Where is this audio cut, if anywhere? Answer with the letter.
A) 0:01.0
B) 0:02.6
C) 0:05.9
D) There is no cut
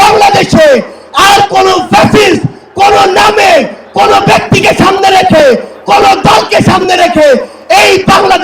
D